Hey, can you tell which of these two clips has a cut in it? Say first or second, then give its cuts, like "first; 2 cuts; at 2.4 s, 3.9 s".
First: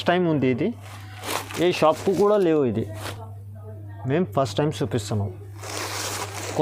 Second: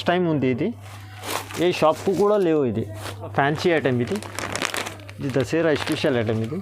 second; 1 cut; at 3.3 s